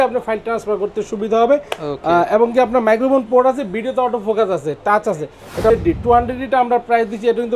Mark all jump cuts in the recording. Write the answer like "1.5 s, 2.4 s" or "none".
5.7 s